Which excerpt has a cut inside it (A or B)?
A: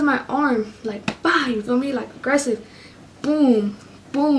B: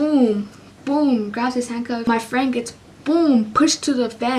B